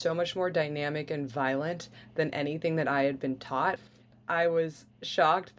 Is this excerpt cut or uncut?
cut